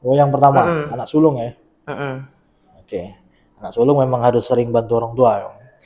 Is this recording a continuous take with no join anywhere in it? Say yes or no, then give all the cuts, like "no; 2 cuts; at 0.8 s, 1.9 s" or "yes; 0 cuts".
yes; 0 cuts